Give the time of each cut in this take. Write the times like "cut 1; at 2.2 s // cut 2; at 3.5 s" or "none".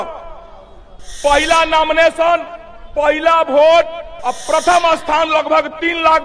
none

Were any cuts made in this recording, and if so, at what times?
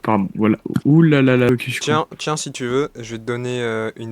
cut 1; at 1.5 s

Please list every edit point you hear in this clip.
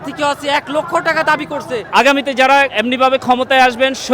cut 1; at 1.8 s // cut 2; at 2.7 s

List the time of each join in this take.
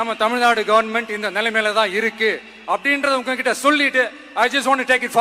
none

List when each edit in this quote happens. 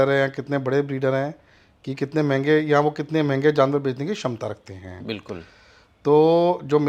none

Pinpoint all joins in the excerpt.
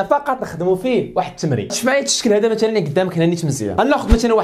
cut 1; at 1.7 s

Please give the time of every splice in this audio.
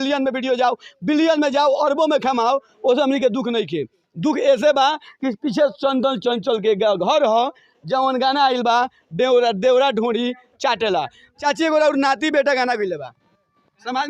cut 1; at 11.2 s

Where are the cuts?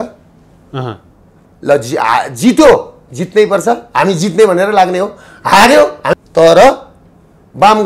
cut 1; at 6.0 s

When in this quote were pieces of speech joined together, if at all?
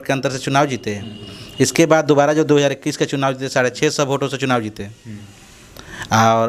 none

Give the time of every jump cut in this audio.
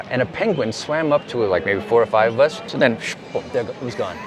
cut 1; at 2.7 s

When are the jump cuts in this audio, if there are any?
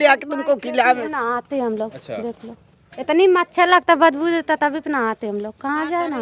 cut 1; at 1.0 s // cut 2; at 3.3 s

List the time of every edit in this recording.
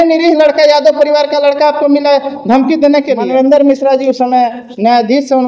cut 1; at 3.2 s

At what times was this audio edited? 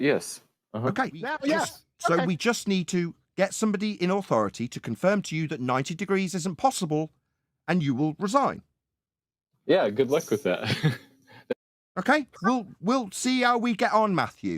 cut 1; at 1.3 s

